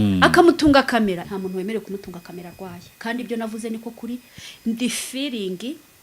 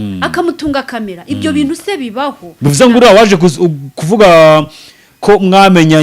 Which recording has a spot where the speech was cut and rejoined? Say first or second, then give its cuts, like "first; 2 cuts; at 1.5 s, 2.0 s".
first; 2 cuts; at 1.2 s, 4.4 s